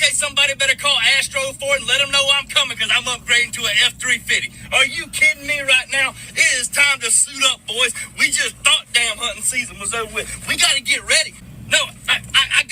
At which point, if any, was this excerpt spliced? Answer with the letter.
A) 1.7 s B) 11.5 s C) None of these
B